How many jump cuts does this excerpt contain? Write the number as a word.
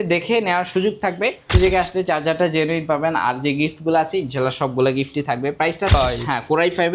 two